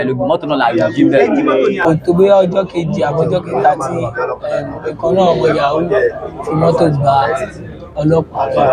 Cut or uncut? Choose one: cut